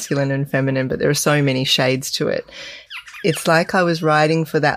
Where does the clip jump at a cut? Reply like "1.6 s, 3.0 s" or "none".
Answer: 2.8 s